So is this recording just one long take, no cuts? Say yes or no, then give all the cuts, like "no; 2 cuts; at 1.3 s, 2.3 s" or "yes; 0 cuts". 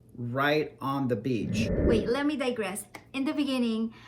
no; 1 cut; at 1.8 s